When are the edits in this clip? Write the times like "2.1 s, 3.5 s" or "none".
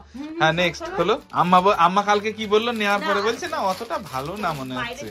1.3 s